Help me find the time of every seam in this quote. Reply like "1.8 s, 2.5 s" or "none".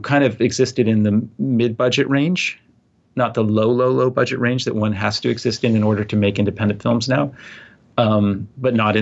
none